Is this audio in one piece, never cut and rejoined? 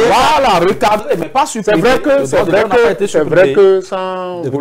yes; 0 cuts

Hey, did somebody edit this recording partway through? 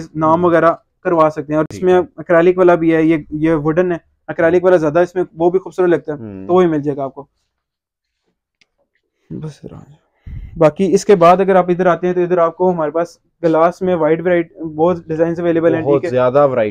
no; 0 cuts

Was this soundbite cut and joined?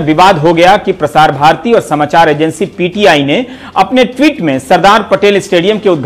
no; 0 cuts

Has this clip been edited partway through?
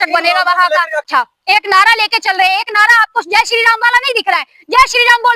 yes; 1 cut; at 1.1 s

